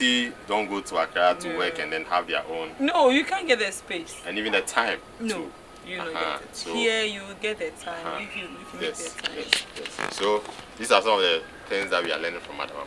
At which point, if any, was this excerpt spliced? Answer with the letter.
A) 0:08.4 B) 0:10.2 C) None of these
C